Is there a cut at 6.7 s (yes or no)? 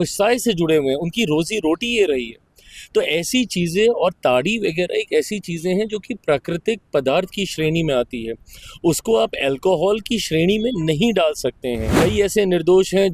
no